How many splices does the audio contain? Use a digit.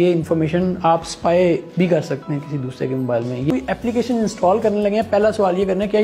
1